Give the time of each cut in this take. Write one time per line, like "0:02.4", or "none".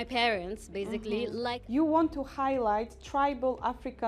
0:01.6